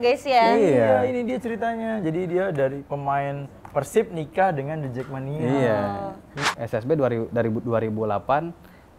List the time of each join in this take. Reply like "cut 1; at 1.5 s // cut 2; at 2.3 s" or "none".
cut 1; at 6.4 s